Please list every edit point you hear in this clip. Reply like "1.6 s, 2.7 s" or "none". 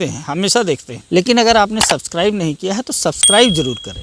0.9 s